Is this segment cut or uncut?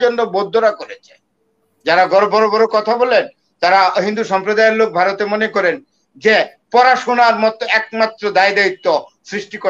uncut